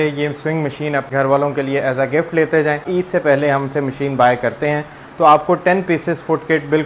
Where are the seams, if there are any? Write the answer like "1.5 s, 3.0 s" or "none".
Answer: 1.1 s, 2.9 s